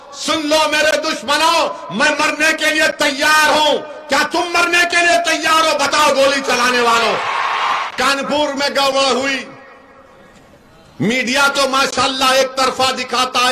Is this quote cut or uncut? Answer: cut